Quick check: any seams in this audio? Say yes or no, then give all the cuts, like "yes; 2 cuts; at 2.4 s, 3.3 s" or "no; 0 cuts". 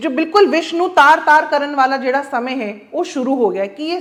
no; 0 cuts